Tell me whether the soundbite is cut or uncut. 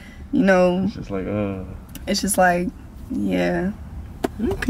uncut